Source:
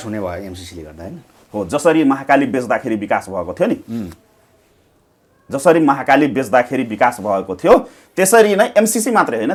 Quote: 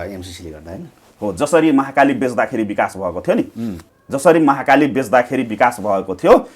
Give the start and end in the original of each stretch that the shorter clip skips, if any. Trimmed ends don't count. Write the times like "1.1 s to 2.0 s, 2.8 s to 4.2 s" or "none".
4.2 s to 5.3 s